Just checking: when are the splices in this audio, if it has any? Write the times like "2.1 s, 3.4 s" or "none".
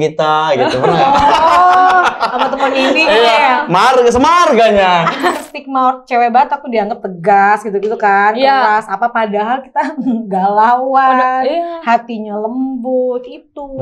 5.4 s